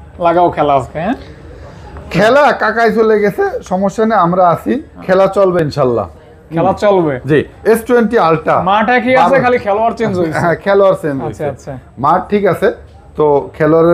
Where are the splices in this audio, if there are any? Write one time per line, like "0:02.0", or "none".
none